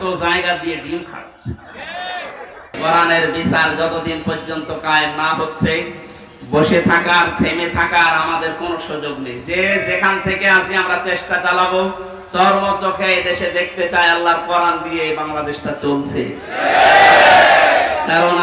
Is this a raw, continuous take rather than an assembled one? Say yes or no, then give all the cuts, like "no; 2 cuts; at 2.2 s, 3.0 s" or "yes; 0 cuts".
no; 1 cut; at 2.7 s